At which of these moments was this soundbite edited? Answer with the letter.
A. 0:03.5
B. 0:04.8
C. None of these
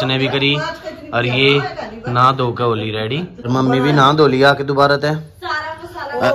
A